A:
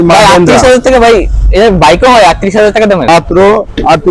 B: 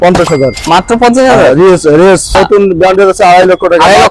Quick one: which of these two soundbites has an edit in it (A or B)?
B